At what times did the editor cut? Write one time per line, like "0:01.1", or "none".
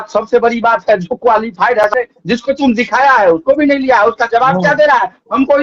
0:01.8